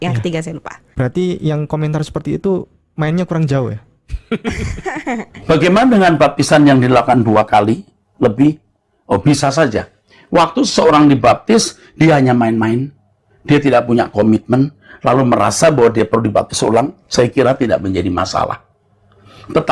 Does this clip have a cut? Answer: yes; 1 cut; at 5.3 s

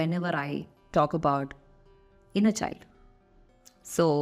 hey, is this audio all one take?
yes; 0 cuts

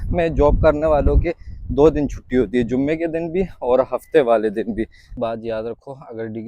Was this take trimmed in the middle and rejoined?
yes; 1 cut; at 5.1 s

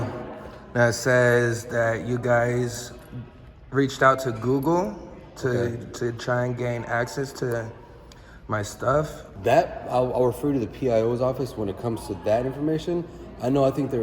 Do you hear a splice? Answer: yes; 1 cut; at 9.2 s

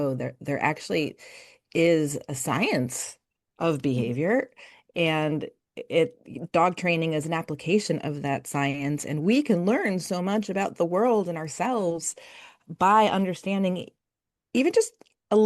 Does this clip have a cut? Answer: no; 0 cuts

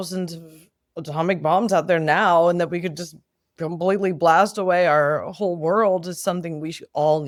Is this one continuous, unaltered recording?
yes; 0 cuts

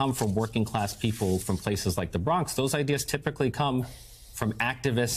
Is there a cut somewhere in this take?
no; 0 cuts

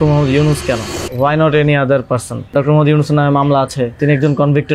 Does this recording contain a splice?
yes; 3 cuts; at 1.0 s, 2.5 s, 4.0 s

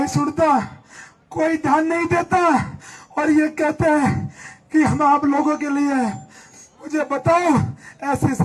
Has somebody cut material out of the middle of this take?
no; 0 cuts

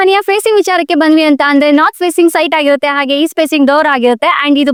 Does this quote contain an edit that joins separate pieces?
no; 0 cuts

